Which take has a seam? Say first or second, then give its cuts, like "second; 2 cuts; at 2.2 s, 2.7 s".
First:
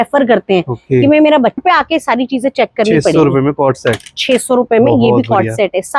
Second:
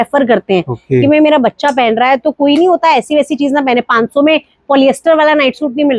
first; 1 cut; at 1.6 s